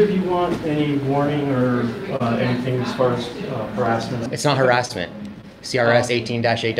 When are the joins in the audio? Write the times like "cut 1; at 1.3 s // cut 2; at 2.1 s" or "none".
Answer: cut 1; at 2.1 s // cut 2; at 4.3 s